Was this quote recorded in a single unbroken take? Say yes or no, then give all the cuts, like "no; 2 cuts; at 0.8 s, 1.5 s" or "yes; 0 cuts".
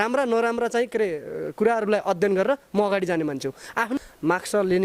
no; 1 cut; at 3.9 s